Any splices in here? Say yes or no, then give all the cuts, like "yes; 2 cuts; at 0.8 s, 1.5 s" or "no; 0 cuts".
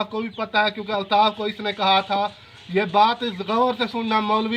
no; 0 cuts